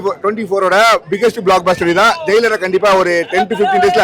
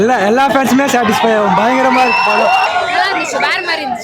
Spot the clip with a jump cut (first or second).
second